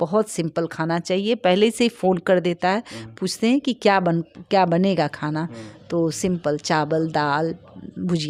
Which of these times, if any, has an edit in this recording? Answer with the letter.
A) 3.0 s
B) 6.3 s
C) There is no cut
C